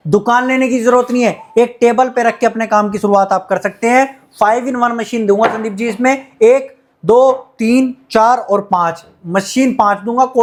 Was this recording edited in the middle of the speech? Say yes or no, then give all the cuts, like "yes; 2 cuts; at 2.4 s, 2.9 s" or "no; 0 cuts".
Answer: no; 0 cuts